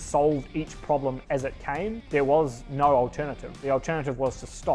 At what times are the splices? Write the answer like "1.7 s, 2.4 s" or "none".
3.6 s